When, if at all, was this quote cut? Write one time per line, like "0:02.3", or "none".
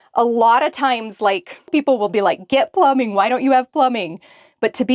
0:01.7